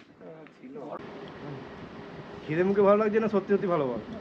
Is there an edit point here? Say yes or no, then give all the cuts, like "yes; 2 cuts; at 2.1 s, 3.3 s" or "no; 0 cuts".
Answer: yes; 1 cut; at 1.0 s